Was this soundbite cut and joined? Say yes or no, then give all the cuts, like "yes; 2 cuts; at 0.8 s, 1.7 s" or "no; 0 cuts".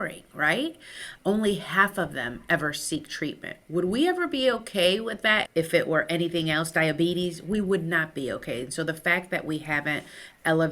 yes; 1 cut; at 5.5 s